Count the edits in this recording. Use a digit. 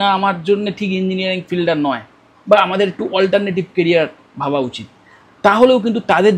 0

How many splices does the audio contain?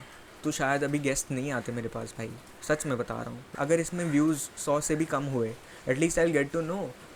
1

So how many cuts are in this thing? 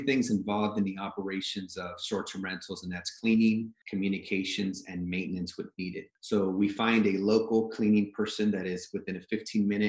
2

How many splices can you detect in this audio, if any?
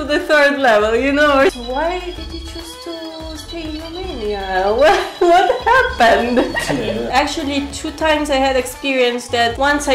2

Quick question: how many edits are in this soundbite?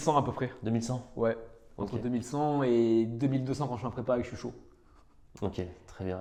0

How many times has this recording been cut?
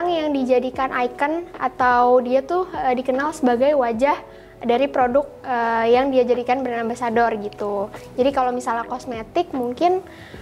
0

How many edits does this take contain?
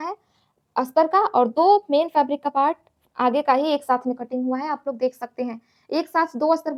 0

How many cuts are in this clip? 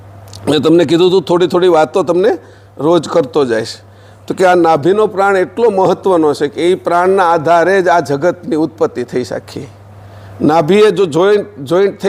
0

